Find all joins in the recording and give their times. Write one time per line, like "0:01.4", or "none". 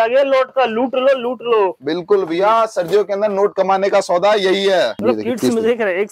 0:05.0